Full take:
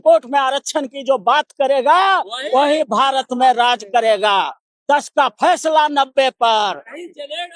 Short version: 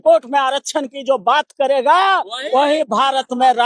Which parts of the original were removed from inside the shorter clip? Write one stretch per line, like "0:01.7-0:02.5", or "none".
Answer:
none